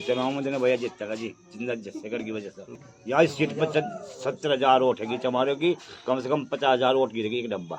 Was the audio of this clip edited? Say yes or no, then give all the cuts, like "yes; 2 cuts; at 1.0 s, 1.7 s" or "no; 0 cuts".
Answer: yes; 1 cut; at 2.7 s